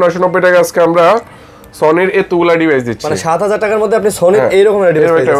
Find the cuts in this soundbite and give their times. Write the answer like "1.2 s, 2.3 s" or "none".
none